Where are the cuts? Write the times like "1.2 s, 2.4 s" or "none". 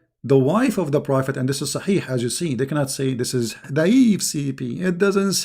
3.6 s